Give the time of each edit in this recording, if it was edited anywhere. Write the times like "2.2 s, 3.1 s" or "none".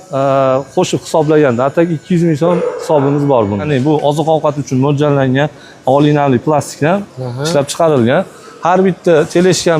3.7 s

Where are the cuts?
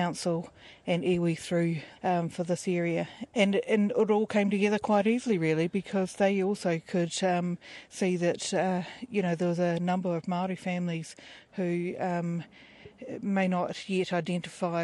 1.9 s, 3.2 s, 11.3 s

